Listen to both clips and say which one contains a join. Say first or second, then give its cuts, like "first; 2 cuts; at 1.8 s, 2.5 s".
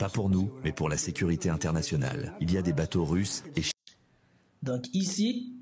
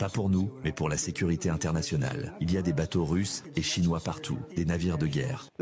second; 1 cut; at 3.7 s